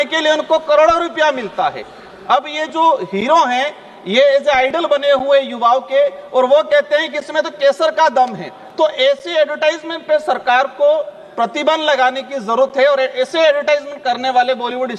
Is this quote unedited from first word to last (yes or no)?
yes